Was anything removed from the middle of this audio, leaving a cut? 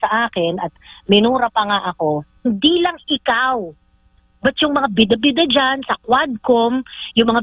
yes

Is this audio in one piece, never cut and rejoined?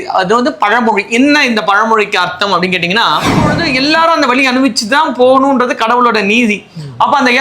no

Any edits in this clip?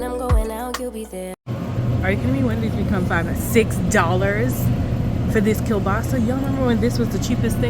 yes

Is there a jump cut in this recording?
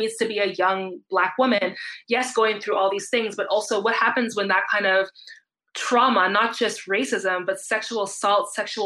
no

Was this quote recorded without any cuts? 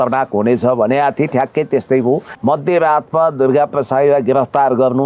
no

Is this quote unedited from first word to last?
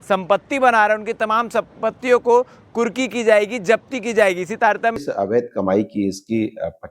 no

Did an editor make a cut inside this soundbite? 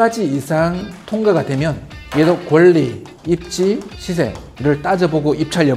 no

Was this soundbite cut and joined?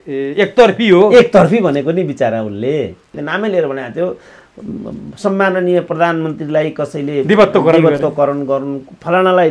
yes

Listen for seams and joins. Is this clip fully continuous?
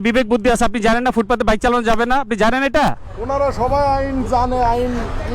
yes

